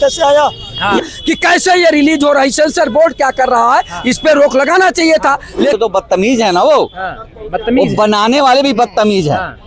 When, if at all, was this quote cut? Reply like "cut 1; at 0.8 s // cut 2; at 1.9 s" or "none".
cut 1; at 1.0 s // cut 2; at 5.8 s